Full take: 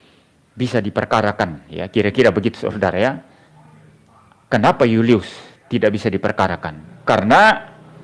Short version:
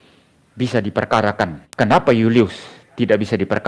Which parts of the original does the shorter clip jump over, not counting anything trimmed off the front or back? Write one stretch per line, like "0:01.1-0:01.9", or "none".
0:01.6-0:04.3